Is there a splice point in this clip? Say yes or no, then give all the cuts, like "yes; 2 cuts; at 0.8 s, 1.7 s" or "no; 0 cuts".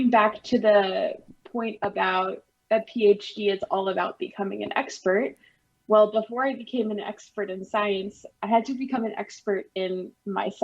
no; 0 cuts